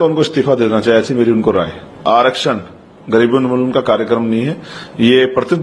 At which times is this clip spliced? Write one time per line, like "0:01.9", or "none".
0:02.0